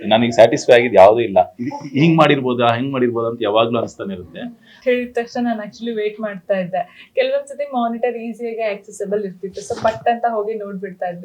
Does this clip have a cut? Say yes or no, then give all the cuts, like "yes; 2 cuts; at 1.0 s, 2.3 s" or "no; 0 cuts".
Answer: yes; 1 cut; at 4.8 s